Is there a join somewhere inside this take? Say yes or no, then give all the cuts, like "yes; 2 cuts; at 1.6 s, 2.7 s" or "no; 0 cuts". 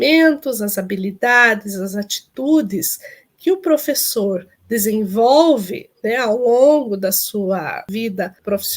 yes; 1 cut; at 7.9 s